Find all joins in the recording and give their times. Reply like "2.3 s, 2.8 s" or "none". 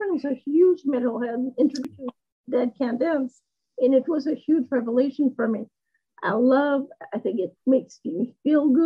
1.9 s